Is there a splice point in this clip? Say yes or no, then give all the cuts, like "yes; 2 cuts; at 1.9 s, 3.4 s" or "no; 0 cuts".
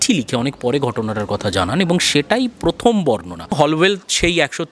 yes; 1 cut; at 3.5 s